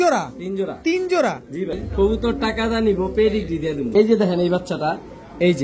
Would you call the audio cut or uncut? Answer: cut